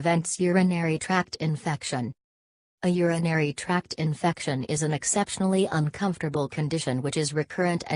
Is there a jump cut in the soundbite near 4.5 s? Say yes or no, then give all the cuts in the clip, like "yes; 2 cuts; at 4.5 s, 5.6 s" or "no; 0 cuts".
no; 1 cut; at 1.4 s